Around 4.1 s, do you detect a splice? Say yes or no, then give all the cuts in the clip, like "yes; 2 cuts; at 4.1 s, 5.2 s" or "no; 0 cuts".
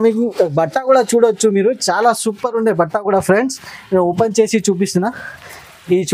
no; 0 cuts